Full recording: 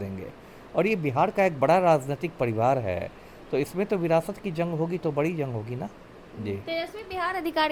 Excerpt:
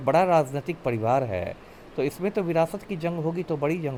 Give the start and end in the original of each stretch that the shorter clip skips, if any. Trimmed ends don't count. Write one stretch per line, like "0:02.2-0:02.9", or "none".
none